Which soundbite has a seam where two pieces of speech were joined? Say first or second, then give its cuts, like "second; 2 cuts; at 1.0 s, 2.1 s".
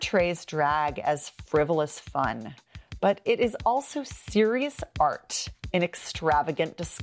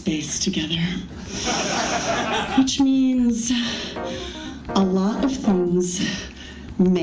second; 1 cut; at 2.5 s